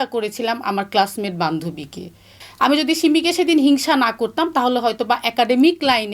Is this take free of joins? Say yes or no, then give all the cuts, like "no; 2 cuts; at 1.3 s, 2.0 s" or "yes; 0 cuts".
no; 1 cut; at 2.4 s